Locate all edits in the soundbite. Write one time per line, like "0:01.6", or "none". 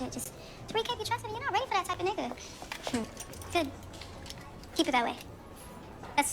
0:03.0